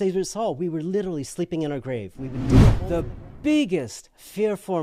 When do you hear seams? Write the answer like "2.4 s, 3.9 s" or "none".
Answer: 2.7 s

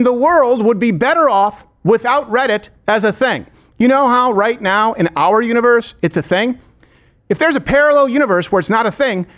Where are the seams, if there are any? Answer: none

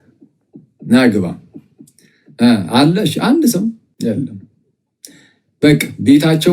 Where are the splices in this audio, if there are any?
3.9 s

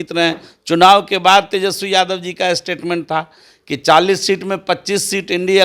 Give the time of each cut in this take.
none

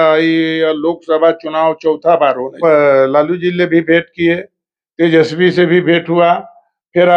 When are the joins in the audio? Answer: 2.6 s

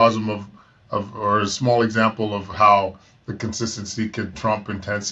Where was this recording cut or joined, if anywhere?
none

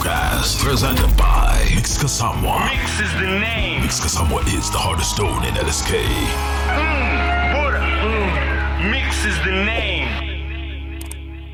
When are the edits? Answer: none

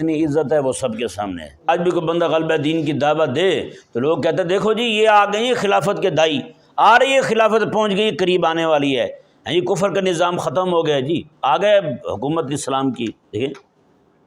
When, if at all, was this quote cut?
1.7 s

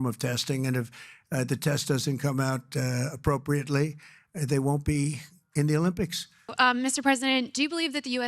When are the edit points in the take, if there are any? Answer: 6.5 s

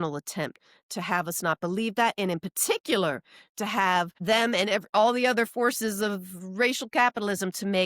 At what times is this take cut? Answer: 4.2 s

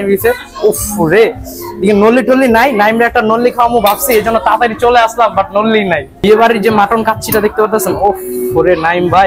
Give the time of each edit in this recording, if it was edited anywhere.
6.2 s

